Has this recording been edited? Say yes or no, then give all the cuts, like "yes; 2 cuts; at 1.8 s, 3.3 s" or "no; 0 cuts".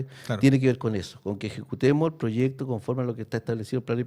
no; 0 cuts